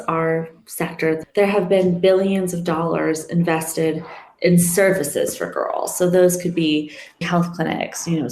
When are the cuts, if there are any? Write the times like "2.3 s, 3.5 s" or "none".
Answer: 1.2 s, 7.2 s